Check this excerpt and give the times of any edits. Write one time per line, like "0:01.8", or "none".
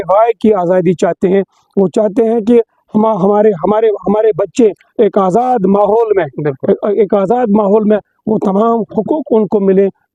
none